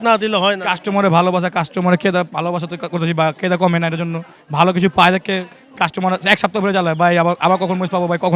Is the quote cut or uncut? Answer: uncut